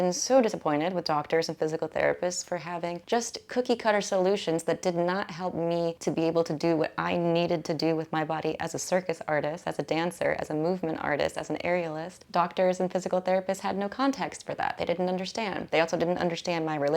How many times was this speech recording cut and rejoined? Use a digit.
4